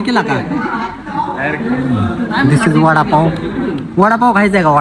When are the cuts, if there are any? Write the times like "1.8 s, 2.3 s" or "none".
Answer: none